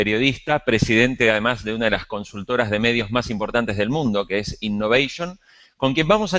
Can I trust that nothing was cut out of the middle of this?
no; 1 cut; at 2.3 s

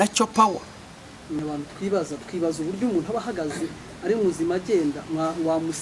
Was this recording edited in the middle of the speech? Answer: yes; 1 cut; at 1.4 s

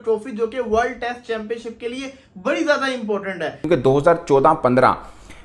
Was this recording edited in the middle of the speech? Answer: yes; 1 cut; at 3.7 s

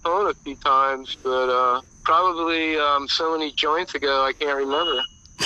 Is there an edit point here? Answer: yes; 1 cut; at 1.9 s

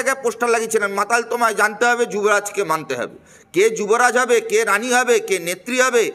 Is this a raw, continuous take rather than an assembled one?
yes; 0 cuts

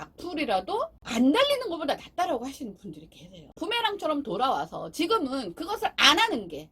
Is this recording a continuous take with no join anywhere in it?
no; 2 cuts; at 1.0 s, 3.5 s

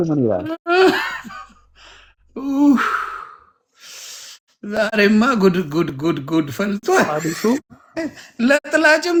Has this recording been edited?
no; 0 cuts

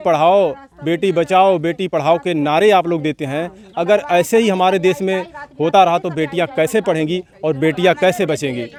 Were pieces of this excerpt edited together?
no; 0 cuts

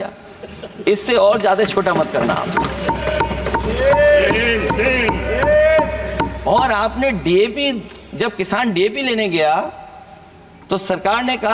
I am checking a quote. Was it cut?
no; 0 cuts

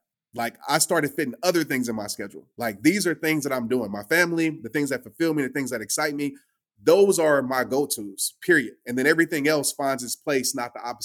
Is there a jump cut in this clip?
no; 0 cuts

